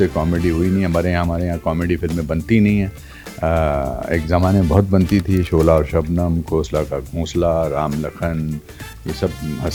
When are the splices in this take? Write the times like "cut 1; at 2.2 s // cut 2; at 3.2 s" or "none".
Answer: none